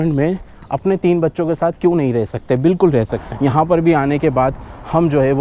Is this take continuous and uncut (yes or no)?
no